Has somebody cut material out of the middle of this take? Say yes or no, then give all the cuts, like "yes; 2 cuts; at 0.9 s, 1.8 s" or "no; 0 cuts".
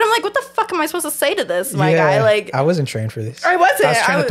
no; 0 cuts